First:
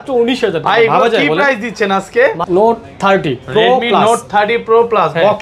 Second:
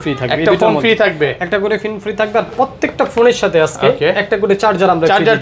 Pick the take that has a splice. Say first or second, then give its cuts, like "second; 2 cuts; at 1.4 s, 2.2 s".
first; 1 cut; at 2.4 s